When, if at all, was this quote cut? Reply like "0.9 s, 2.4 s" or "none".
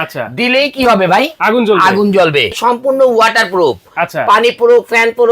2.6 s